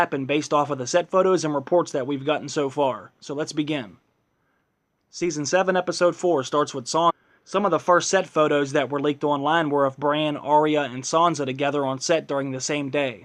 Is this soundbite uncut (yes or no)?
yes